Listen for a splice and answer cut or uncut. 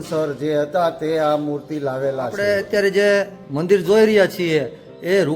cut